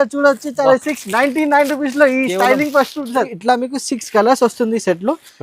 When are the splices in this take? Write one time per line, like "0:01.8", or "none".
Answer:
0:03.3